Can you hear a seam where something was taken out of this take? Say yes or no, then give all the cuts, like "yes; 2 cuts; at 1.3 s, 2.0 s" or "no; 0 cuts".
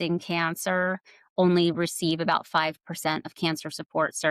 no; 0 cuts